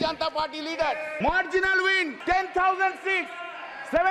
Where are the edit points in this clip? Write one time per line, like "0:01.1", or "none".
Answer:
0:01.1
0:02.1